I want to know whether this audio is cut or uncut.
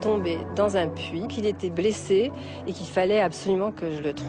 cut